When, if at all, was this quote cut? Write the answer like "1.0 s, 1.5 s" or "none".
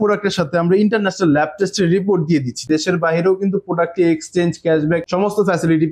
2.7 s